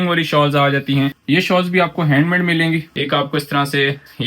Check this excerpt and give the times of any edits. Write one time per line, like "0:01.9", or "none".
0:01.2
0:02.9

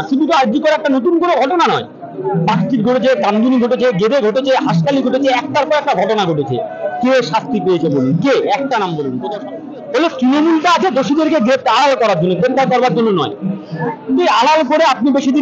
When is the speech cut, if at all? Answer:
0:09.5

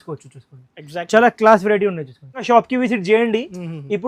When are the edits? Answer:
0:02.4

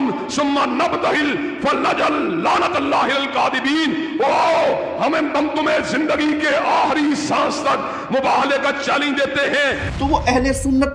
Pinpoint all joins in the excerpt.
0:09.9

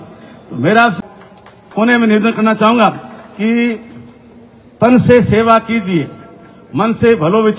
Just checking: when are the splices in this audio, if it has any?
0:01.0

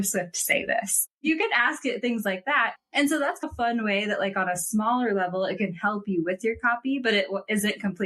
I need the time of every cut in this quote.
0:01.2

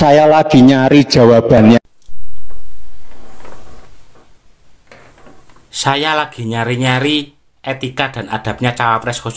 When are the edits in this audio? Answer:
none

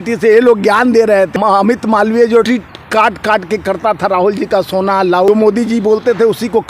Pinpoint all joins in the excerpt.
0:01.3
0:02.5
0:05.3

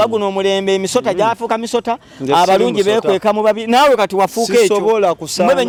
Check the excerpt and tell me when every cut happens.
none

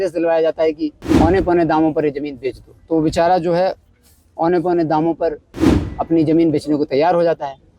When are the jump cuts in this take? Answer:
0:01.0

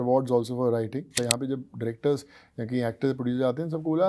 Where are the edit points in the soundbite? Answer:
0:01.2

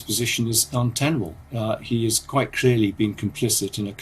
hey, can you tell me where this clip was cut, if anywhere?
0:01.4

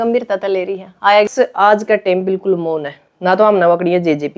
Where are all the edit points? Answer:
0:01.3

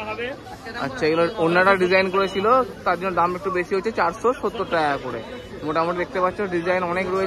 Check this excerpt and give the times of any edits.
none

